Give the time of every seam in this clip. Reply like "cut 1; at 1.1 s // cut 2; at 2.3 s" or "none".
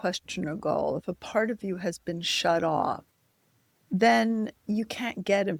none